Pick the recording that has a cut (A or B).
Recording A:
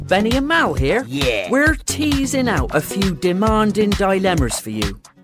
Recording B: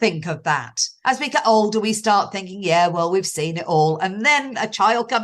B